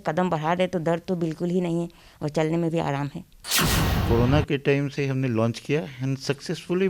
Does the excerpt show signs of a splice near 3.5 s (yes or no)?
yes